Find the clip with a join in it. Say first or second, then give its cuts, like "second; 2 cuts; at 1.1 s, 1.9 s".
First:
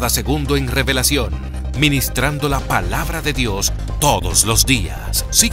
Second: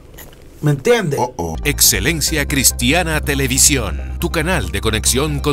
second; 1 cut; at 1.5 s